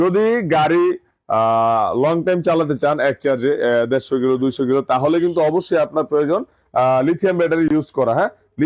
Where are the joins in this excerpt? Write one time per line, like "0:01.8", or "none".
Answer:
none